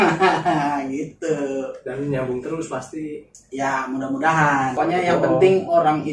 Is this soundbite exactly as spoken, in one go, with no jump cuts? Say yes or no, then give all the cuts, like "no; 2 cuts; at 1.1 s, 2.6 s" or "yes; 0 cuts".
no; 1 cut; at 4.8 s